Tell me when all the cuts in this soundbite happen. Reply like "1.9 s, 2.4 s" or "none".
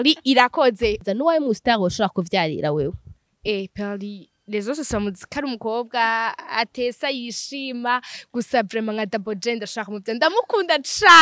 1.0 s